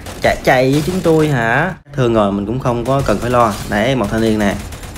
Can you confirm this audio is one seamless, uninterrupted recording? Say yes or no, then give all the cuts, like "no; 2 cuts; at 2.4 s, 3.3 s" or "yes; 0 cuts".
no; 1 cut; at 1.9 s